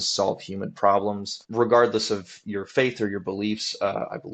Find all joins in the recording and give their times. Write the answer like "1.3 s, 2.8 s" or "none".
1.4 s

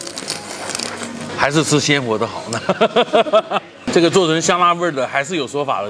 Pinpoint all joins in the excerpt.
1.3 s, 3.7 s

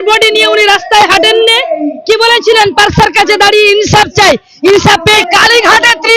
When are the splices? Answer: 5.2 s

